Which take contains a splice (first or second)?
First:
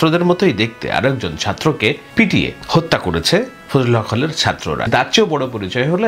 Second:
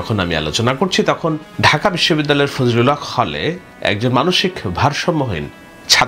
first